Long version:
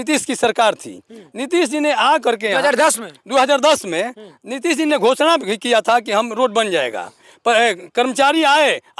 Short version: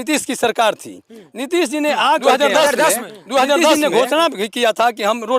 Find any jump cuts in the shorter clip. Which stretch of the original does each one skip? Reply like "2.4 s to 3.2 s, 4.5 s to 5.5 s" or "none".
3.8 s to 4.8 s

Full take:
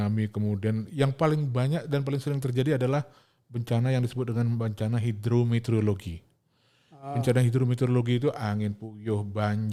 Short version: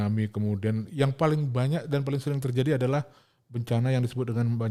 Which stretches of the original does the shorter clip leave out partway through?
none

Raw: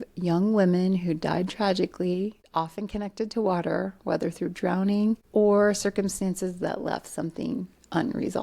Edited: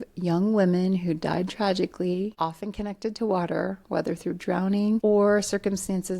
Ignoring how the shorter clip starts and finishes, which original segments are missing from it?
2.3 s to 2.5 s, 5.2 s to 5.3 s

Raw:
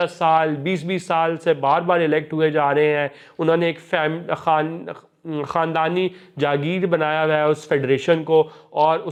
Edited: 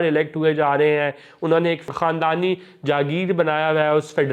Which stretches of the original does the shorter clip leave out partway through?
3.8 s to 5.4 s

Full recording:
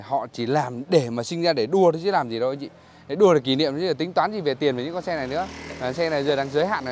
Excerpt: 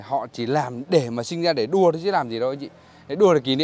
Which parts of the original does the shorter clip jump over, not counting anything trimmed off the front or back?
none

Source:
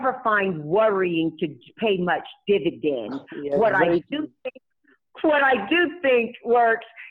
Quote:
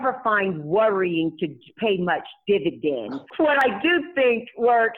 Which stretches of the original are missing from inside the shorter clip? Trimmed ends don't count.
3.5 s to 5.4 s

